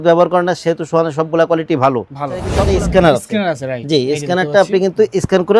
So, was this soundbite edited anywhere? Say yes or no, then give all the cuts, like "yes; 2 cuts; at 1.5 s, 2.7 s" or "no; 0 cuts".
yes; 1 cut; at 2.5 s